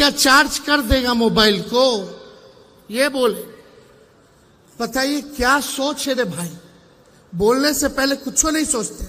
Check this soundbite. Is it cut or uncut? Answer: uncut